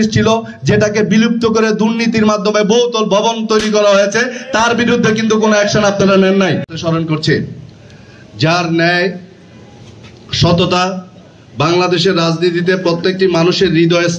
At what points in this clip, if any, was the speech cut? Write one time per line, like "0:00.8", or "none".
0:06.7